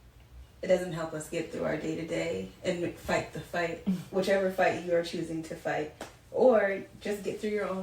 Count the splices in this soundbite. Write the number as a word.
zero